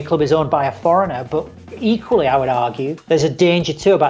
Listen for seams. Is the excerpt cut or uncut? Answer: cut